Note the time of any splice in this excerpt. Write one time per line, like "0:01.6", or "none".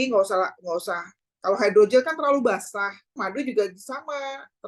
0:03.1